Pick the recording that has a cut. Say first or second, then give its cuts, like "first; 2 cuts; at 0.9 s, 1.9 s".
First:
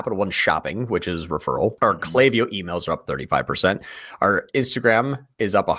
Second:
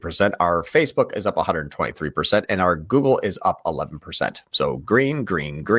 first; 1 cut; at 1.8 s